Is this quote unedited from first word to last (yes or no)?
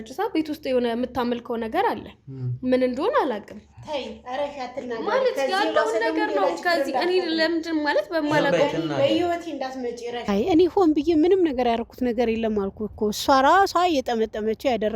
no